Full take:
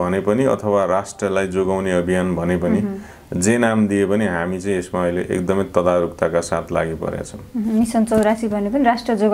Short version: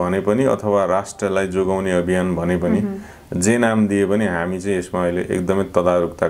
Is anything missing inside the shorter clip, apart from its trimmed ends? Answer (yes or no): no